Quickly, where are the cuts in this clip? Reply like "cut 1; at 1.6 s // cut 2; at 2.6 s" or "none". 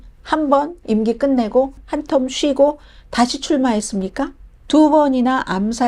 cut 1; at 1.9 s // cut 2; at 4.5 s